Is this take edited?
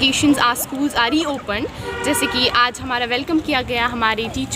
no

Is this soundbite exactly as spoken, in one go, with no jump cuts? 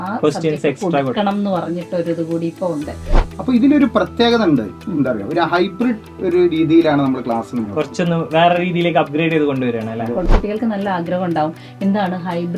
no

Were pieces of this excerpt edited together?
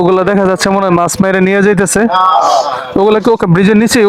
no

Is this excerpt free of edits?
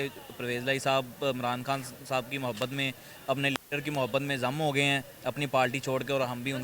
yes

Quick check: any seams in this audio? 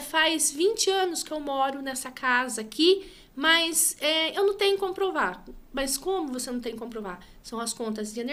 no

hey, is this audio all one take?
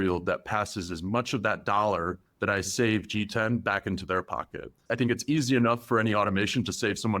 no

